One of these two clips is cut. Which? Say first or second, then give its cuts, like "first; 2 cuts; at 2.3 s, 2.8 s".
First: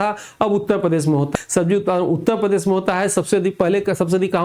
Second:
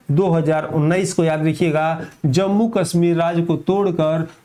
first; 1 cut; at 1.3 s